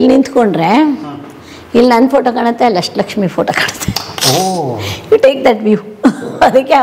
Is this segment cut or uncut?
uncut